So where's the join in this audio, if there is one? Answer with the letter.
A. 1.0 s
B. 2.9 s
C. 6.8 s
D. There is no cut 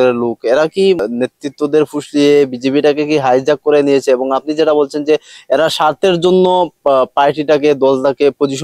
A